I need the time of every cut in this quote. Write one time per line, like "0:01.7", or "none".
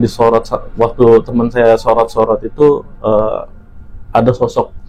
none

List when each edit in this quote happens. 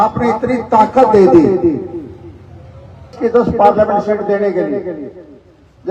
0:03.1

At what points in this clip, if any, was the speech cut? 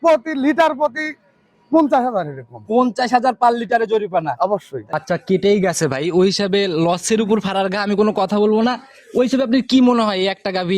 0:04.9

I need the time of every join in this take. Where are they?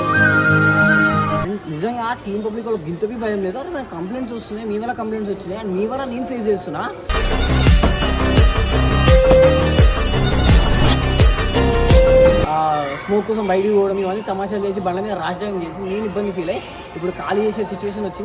0:01.5
0:12.5

